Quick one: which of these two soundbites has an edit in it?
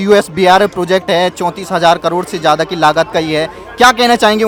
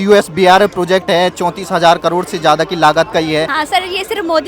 second; 1 cut; at 3.6 s

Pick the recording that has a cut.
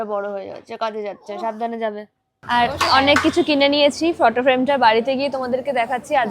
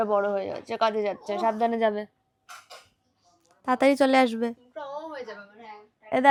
first; 1 cut; at 2.3 s

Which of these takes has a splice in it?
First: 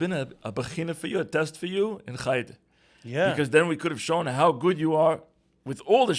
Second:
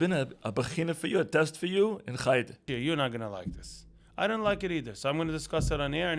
second; 1 cut; at 2.7 s

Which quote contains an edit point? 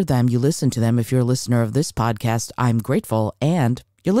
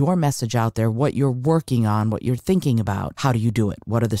second; 1 cut; at 3.1 s

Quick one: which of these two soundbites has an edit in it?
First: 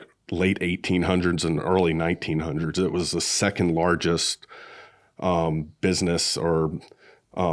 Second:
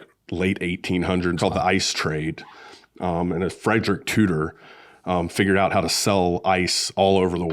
second; 1 cut; at 1.4 s

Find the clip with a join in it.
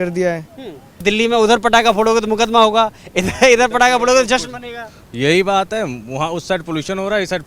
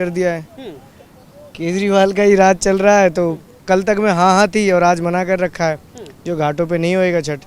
first; 1 cut; at 1.0 s

